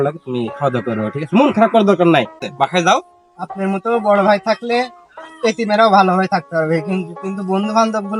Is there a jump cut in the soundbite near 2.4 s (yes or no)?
yes